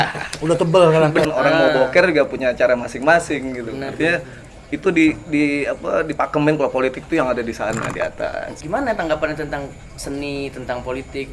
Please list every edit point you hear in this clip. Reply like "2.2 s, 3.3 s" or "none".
1.3 s, 8.5 s